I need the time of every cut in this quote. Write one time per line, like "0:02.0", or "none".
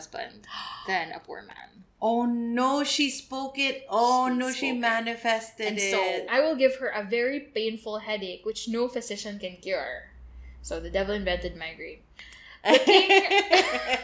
0:06.3